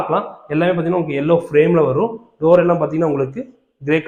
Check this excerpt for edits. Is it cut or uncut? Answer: uncut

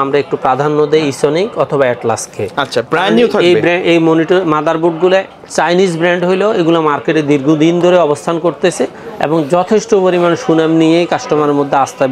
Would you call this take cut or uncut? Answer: uncut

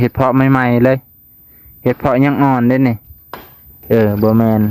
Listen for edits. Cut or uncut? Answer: cut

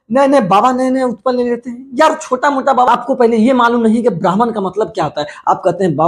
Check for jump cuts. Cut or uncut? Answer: cut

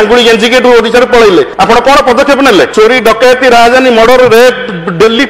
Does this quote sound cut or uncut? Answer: cut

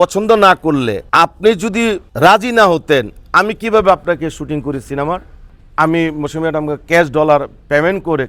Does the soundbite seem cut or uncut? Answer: cut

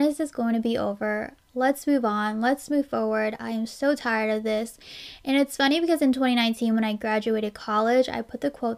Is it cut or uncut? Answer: uncut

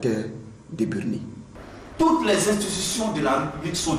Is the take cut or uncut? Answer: cut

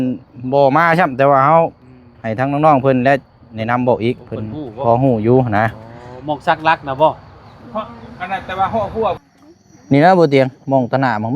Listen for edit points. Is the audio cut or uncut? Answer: cut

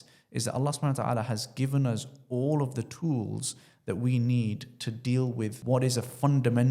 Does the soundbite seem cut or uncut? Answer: cut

